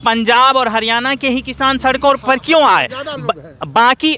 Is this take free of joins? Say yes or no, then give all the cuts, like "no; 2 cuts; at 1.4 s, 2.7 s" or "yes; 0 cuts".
yes; 0 cuts